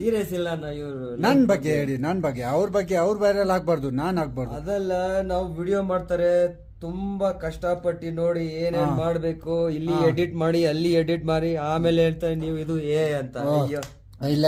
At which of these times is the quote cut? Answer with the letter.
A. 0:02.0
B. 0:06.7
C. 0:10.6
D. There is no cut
D